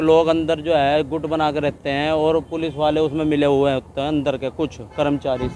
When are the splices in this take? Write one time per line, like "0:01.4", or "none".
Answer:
none